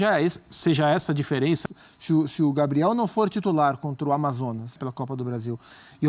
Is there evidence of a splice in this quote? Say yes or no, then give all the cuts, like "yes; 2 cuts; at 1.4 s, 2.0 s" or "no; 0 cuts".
yes; 2 cuts; at 1.6 s, 4.8 s